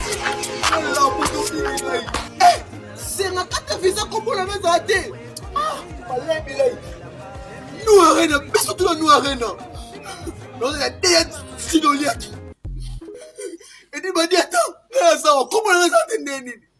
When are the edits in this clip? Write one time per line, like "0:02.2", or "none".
none